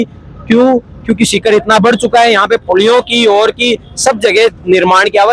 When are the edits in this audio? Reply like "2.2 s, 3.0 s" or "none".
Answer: none